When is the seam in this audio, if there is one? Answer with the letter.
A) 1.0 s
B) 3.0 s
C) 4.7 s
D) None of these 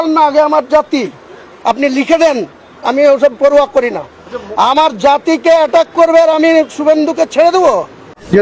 A